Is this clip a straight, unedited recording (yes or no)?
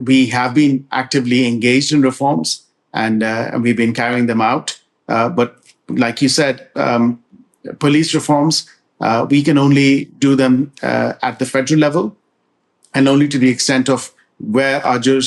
yes